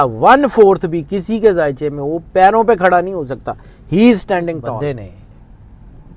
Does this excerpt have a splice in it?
yes; 1 cut; at 4.7 s

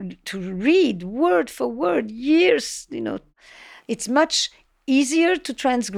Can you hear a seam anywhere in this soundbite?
yes; 1 cut; at 3.6 s

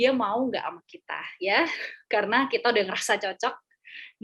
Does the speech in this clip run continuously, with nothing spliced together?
yes; 0 cuts

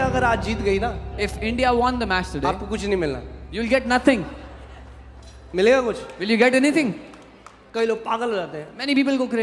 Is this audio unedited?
yes; 0 cuts

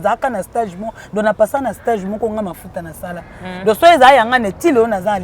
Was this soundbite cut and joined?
no; 0 cuts

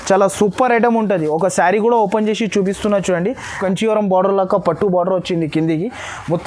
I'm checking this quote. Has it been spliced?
yes; 1 cut; at 3.6 s

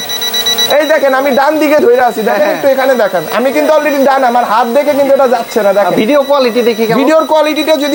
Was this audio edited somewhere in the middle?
no; 0 cuts

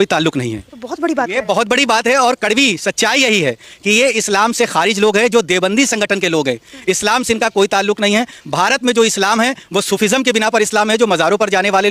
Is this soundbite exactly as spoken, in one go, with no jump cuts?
yes; 0 cuts

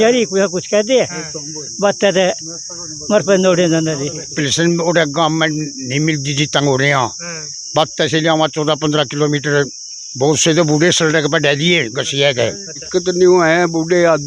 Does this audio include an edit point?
yes; 2 cuts; at 4.4 s, 12.8 s

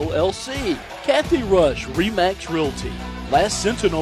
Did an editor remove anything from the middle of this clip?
yes; 1 cut; at 0.9 s

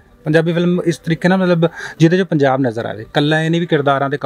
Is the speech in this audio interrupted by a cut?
no; 0 cuts

